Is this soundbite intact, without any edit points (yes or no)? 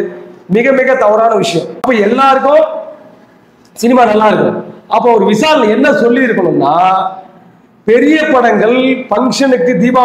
no